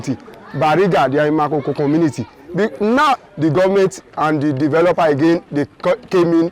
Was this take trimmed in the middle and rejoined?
yes; 1 cut; at 3.2 s

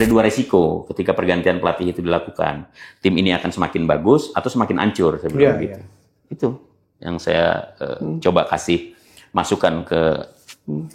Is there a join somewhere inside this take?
no; 0 cuts

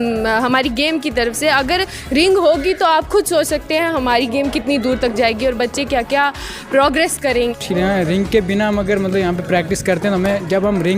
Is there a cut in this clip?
yes; 1 cut; at 7.6 s

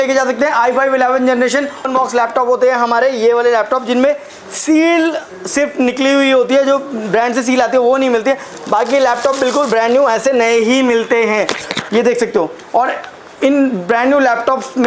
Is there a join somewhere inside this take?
yes; 1 cut; at 1.9 s

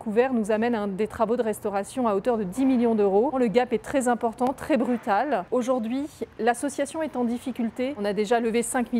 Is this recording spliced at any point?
yes; 2 cuts; at 5.4 s, 8.0 s

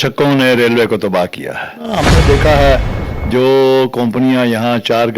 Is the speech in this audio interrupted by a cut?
yes; 1 cut; at 2.1 s

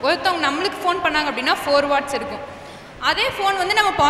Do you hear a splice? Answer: no; 0 cuts

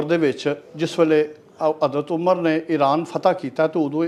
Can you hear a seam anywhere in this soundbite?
no; 0 cuts

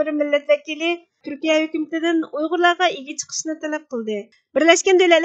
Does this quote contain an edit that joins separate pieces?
yes; 2 cuts; at 1.1 s, 4.2 s

